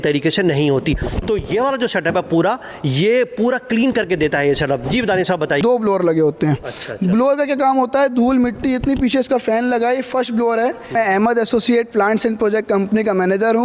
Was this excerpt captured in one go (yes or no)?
no